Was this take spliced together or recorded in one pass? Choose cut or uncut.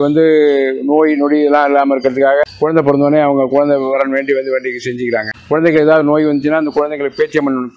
cut